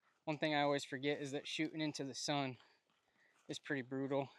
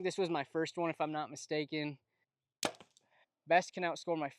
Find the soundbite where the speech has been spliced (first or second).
second